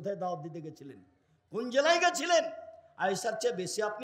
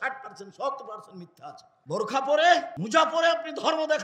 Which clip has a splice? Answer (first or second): second